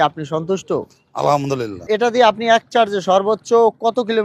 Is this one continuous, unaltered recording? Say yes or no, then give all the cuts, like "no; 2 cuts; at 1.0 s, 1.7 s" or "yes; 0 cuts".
no; 1 cut; at 1.8 s